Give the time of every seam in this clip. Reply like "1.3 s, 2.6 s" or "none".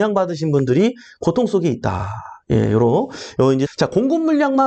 3.7 s